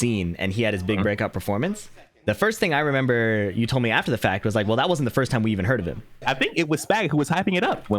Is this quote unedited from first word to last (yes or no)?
no